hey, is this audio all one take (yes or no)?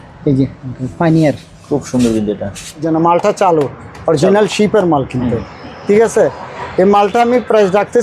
no